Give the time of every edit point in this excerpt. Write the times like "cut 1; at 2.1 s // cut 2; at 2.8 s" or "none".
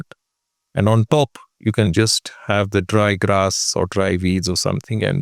none

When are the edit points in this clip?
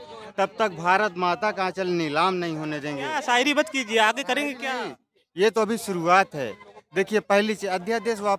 cut 1; at 3.2 s

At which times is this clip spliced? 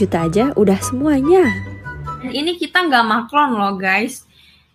cut 1; at 2.3 s

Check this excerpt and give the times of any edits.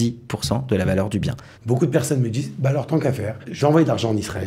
cut 1; at 1.5 s // cut 2; at 3.5 s

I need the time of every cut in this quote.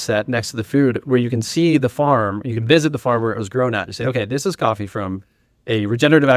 none

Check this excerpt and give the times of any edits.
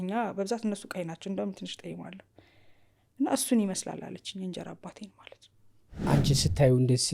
cut 1; at 6.1 s

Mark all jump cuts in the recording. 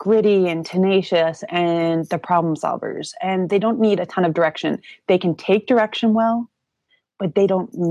none

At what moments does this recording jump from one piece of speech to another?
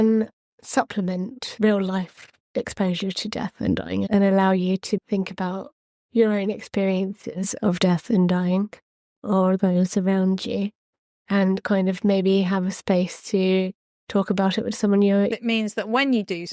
cut 1; at 1.4 s // cut 2; at 15.3 s

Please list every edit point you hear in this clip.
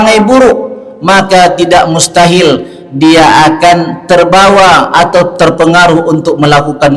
none

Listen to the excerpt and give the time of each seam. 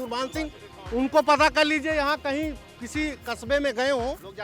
none

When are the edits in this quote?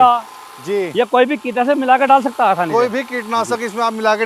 none

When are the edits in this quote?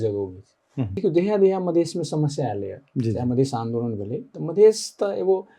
cut 1; at 0.9 s

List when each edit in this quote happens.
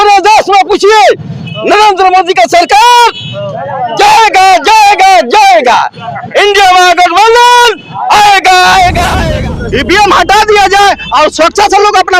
cut 1; at 9.1 s

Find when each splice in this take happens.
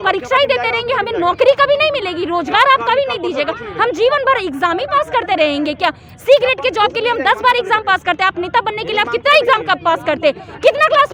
none

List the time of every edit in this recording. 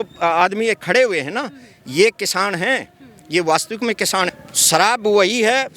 cut 1; at 4.5 s

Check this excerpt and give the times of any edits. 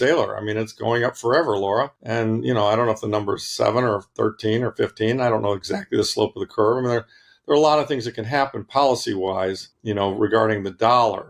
cut 1; at 2.0 s // cut 2; at 9.7 s

